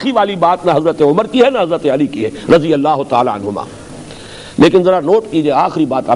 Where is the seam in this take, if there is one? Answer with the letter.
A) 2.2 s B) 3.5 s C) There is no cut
C